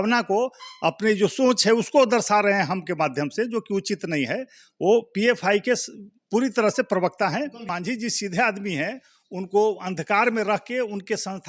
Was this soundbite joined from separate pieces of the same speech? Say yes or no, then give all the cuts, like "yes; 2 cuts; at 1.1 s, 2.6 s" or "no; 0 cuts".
yes; 1 cut; at 7.6 s